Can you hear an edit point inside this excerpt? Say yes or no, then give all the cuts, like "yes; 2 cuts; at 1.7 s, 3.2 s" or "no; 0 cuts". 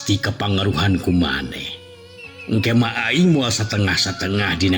no; 0 cuts